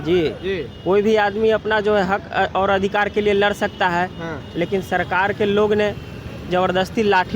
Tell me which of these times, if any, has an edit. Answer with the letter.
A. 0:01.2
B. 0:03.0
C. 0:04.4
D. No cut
C